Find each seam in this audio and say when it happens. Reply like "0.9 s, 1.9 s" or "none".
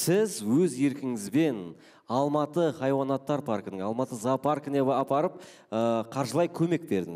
none